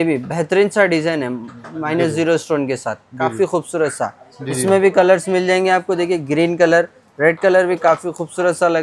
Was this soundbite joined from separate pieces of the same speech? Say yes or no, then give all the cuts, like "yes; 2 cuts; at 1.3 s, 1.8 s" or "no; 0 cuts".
no; 0 cuts